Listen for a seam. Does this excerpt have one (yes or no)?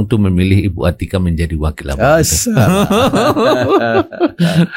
no